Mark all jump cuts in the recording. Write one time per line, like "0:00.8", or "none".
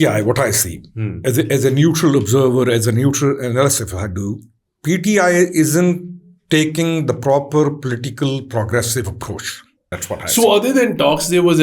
0:09.9